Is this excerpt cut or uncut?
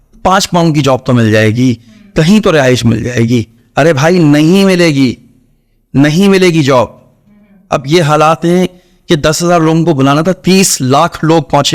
uncut